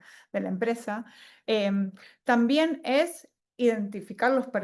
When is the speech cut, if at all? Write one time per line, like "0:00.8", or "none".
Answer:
none